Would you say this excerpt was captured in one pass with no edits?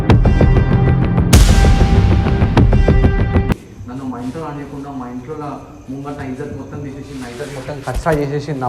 yes; 0 cuts

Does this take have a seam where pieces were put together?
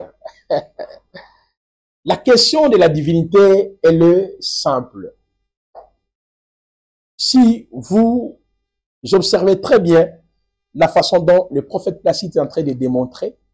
no; 0 cuts

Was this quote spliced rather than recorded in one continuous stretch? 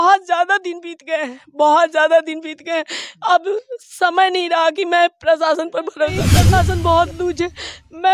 yes; 1 cut; at 6.3 s

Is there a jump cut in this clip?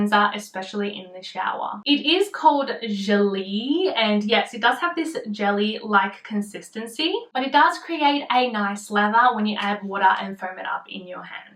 no; 0 cuts

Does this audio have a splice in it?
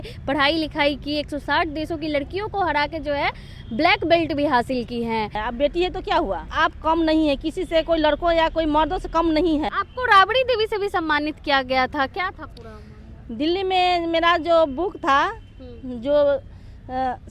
yes; 3 cuts; at 5.4 s, 6.5 s, 9.7 s

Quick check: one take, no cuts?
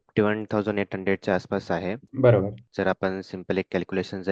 no; 1 cut; at 2.6 s

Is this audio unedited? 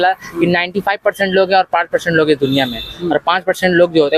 yes; 0 cuts

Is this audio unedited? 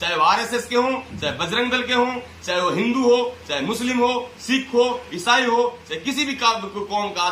yes; 0 cuts

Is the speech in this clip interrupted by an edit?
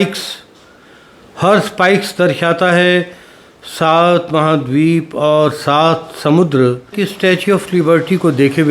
yes; 1 cut; at 7.0 s

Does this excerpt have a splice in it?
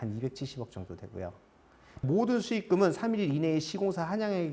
yes; 1 cut; at 2.0 s

